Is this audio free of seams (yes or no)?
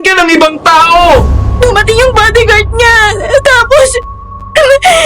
no